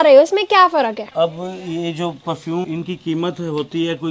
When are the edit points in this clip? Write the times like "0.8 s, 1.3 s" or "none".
1.0 s, 2.7 s